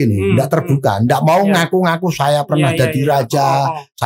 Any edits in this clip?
no; 0 cuts

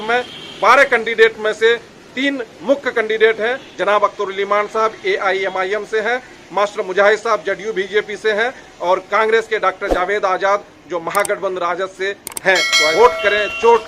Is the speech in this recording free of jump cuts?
no; 2 cuts; at 3.7 s, 12.9 s

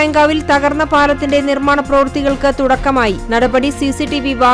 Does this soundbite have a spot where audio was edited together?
no; 0 cuts

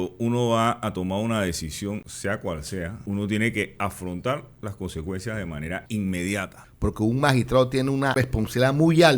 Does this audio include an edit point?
yes; 5 cuts; at 2.1 s, 3.0 s, 5.8 s, 6.6 s, 8.2 s

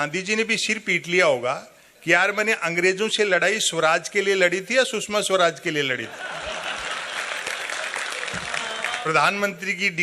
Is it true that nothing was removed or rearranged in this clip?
no; 1 cut; at 9.1 s

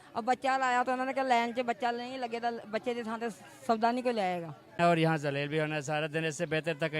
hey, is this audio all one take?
no; 1 cut; at 4.8 s

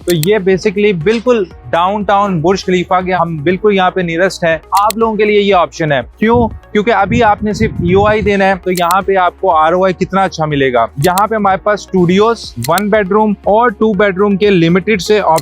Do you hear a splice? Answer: yes; 3 cuts; at 4.6 s, 8.6 s, 10.9 s

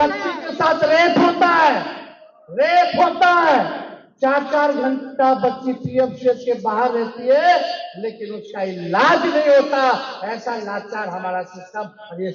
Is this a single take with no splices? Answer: yes; 0 cuts

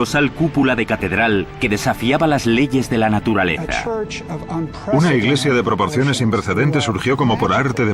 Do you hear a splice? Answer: no; 0 cuts

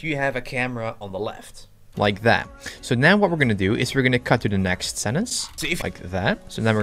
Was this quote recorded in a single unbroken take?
yes; 0 cuts

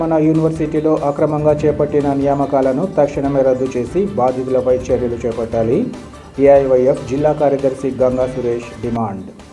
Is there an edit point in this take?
no; 0 cuts

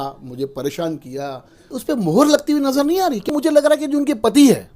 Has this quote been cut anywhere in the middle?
yes; 2 cuts; at 1.7 s, 3.3 s

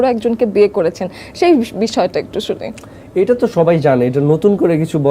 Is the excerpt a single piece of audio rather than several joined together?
yes; 0 cuts

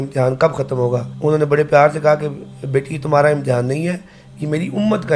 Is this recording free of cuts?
no; 1 cut; at 1.1 s

